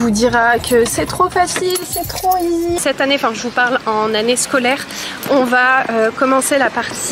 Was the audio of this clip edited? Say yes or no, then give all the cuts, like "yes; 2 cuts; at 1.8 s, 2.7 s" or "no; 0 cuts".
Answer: yes; 1 cut; at 2.8 s